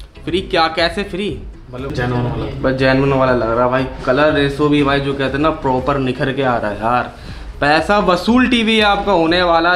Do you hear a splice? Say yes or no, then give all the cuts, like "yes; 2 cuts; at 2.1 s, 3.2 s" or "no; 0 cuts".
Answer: yes; 1 cut; at 1.9 s